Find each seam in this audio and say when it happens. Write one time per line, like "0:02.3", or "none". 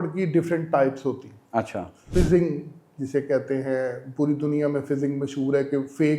0:02.1